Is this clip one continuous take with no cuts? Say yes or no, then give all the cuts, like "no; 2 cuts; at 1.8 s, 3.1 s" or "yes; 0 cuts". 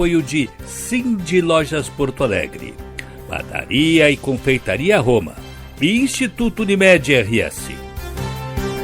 no; 1 cut; at 7.6 s